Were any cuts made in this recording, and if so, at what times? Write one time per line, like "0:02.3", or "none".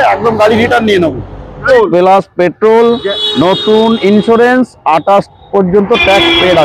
0:01.7